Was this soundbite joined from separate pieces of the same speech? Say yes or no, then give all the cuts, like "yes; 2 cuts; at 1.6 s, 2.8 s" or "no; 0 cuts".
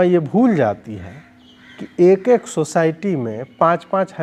no; 0 cuts